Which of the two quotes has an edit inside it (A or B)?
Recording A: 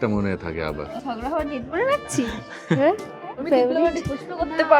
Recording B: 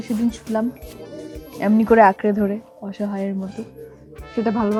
A